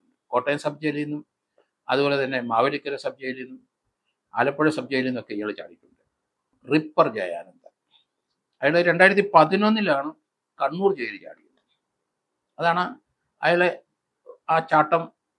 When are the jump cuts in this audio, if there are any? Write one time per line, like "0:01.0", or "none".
0:06.5

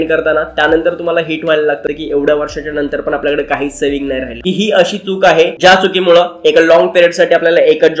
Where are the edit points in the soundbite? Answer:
0:01.9
0:04.4

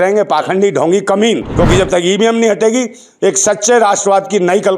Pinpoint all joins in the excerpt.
0:01.5

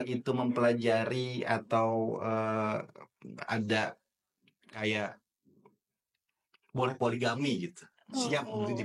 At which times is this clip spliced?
none

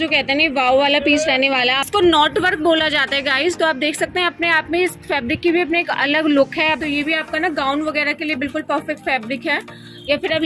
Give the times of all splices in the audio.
0:01.8
0:06.8

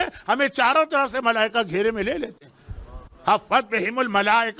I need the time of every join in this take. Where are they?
none

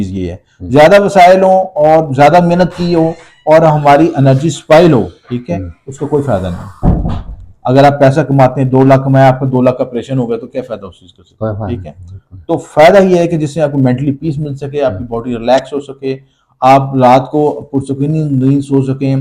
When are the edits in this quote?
none

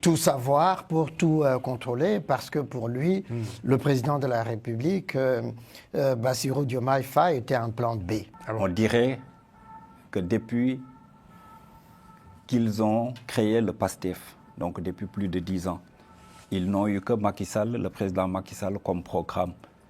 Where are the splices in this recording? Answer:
0:08.4

